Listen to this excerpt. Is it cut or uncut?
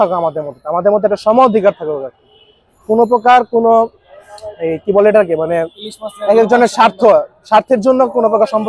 uncut